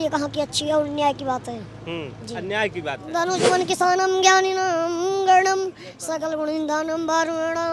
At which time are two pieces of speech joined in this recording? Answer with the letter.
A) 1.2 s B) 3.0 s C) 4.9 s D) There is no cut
B